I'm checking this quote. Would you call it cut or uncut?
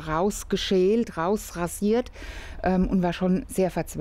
uncut